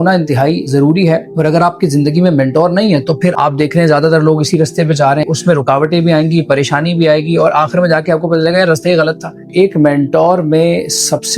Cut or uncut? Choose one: cut